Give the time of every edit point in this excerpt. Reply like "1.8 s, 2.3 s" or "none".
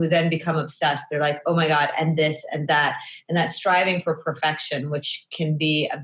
none